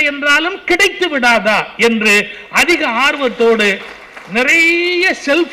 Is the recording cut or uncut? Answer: uncut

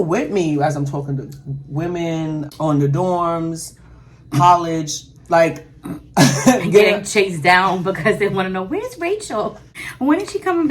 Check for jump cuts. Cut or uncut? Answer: cut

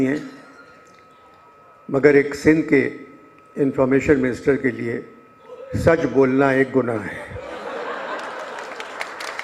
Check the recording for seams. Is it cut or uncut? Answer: uncut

